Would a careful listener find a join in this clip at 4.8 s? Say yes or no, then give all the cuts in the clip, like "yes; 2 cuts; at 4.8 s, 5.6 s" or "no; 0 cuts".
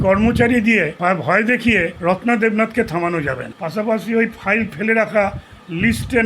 no; 3 cuts; at 0.9 s, 1.9 s, 3.5 s